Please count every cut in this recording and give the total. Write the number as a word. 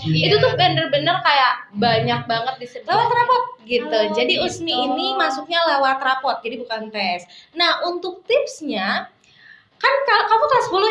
one